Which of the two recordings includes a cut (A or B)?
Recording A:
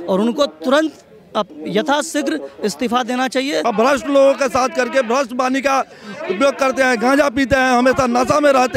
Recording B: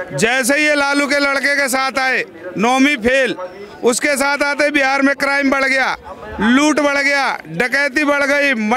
A